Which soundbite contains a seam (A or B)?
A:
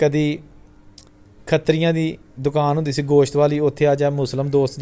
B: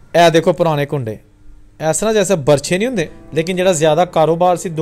B